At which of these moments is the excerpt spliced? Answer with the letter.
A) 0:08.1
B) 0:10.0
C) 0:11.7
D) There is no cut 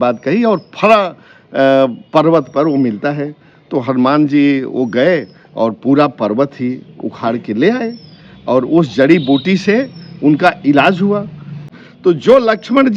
C